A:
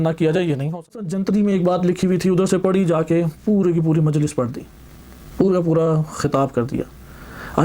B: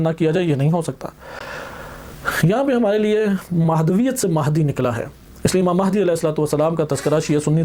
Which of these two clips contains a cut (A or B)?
A